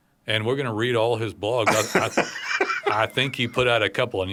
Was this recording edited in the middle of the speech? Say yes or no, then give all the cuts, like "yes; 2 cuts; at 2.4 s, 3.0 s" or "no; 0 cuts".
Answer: no; 0 cuts